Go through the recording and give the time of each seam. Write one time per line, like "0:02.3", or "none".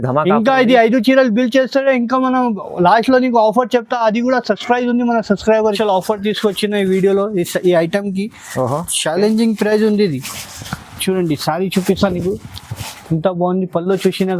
0:05.8